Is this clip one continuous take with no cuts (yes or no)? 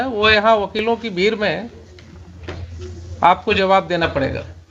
yes